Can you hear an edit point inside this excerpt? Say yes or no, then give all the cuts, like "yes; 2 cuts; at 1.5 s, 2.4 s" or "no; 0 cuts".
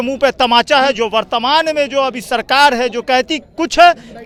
no; 0 cuts